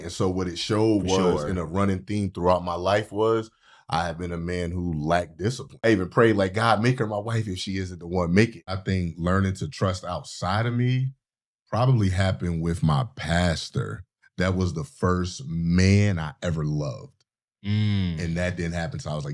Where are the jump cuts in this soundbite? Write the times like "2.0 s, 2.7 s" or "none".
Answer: 5.9 s, 8.8 s